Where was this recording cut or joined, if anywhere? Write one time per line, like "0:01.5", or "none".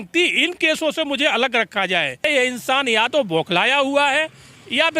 0:02.3